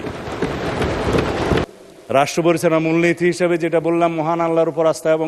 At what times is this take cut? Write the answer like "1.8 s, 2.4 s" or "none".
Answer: 1.7 s